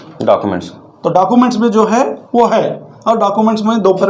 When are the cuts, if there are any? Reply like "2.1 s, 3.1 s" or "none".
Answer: none